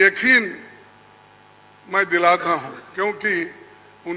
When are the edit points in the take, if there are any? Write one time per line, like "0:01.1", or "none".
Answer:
none